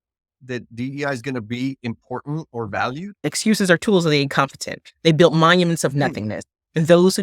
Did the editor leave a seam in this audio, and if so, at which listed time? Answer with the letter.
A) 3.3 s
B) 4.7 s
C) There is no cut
A